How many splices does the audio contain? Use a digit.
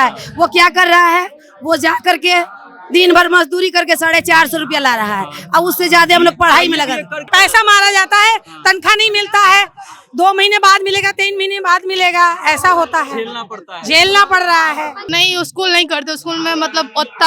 2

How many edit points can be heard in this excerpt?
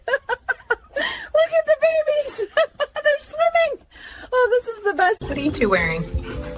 1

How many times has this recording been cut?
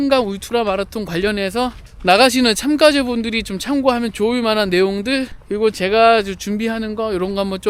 2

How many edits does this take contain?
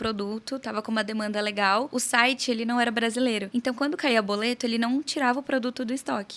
2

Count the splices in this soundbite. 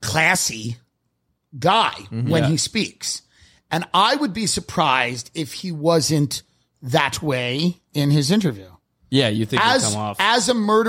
0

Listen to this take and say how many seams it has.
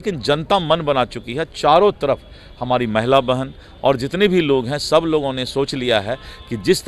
0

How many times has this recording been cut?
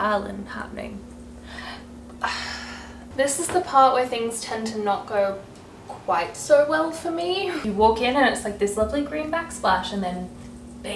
2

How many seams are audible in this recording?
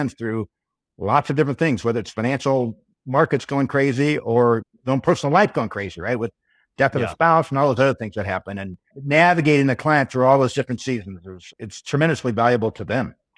1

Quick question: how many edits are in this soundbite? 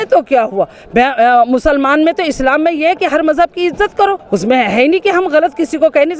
0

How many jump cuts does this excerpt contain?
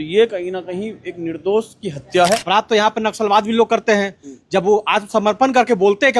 1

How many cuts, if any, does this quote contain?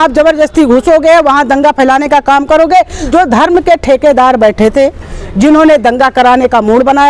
1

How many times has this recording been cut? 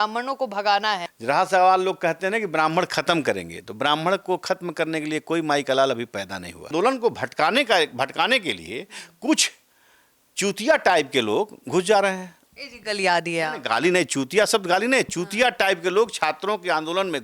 2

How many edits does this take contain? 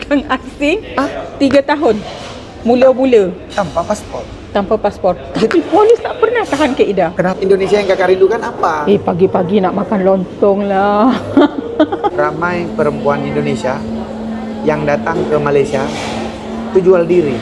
2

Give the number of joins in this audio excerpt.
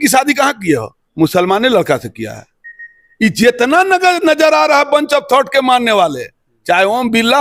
1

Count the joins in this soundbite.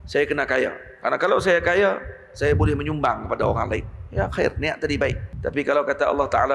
1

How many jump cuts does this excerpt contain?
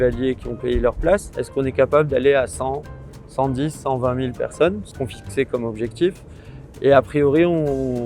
2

